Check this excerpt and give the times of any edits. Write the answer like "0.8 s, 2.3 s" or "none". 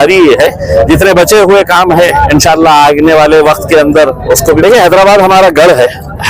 4.6 s

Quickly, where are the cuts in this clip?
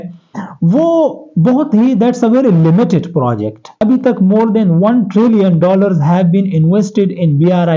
3.8 s

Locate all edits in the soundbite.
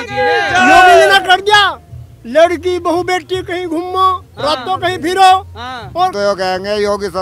6.1 s

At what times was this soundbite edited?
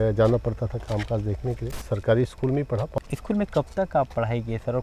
1.7 s, 2.9 s

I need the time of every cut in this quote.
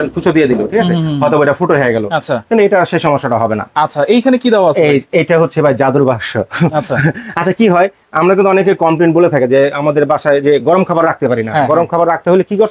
none

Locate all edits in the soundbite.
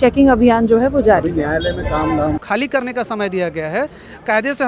2.4 s

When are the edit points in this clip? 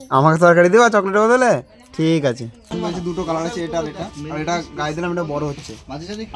2.7 s

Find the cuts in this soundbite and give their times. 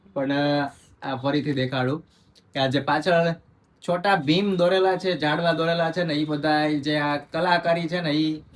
none

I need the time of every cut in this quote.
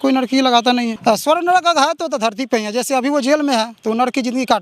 0.9 s

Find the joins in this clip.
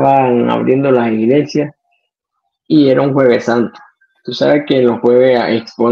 none

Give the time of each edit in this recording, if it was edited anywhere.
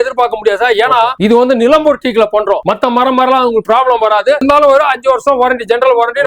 1.1 s, 2.6 s, 4.4 s

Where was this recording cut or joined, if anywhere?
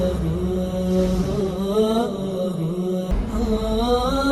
3.1 s

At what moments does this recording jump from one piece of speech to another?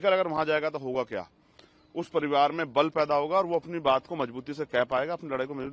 none

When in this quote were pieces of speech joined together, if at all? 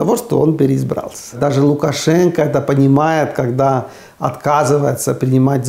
1.3 s

